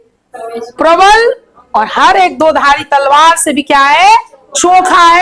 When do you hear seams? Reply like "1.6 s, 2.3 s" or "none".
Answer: none